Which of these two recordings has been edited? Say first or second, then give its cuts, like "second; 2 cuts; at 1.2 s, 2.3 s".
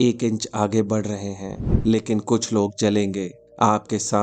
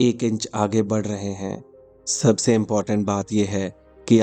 first; 1 cut; at 1.6 s